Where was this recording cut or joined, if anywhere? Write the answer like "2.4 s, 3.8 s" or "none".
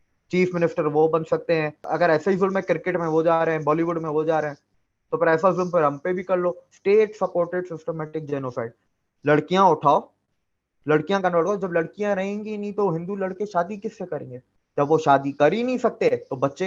1.8 s, 6.7 s